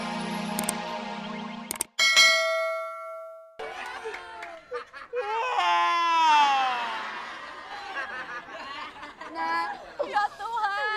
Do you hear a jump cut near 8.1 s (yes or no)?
no